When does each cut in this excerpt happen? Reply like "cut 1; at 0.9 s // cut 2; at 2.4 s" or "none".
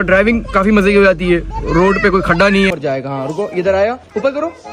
cut 1; at 2.7 s